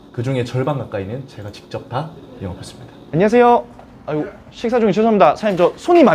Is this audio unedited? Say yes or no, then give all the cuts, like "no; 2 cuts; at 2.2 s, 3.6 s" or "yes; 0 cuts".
no; 1 cut; at 3.0 s